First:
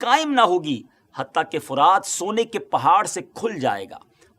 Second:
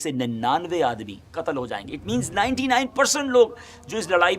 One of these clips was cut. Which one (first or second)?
second